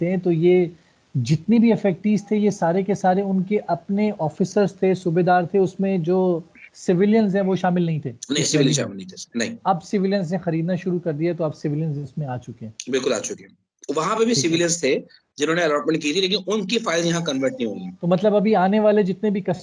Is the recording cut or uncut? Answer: uncut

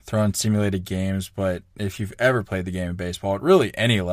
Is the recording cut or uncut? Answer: uncut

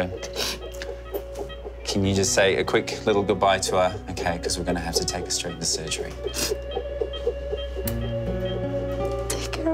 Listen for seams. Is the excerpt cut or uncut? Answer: uncut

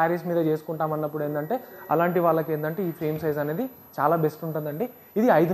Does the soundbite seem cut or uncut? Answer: uncut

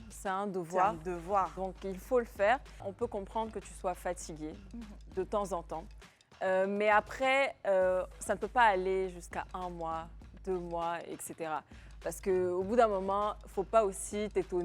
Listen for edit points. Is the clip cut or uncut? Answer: cut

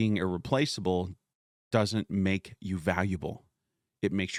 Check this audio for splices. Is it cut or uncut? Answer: uncut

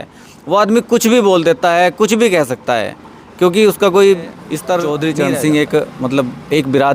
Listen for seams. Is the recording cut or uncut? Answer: cut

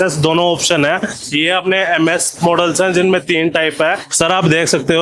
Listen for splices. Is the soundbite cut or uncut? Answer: cut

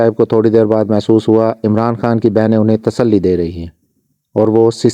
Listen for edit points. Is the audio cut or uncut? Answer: uncut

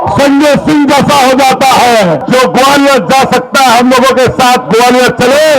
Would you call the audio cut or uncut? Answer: cut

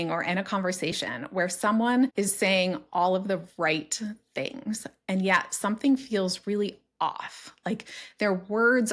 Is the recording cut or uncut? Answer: cut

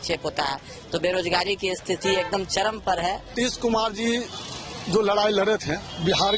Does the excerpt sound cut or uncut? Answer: cut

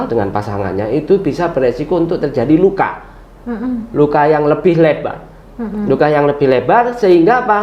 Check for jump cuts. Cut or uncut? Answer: uncut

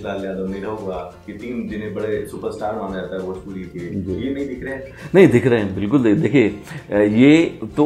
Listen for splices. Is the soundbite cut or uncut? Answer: uncut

